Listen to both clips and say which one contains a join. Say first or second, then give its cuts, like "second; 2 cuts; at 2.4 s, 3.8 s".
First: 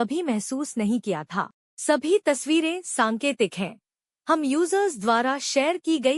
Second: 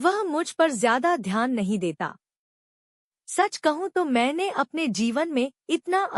first; 1 cut; at 1.6 s